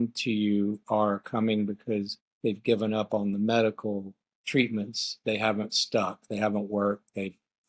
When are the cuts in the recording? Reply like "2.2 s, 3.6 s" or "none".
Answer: 2.2 s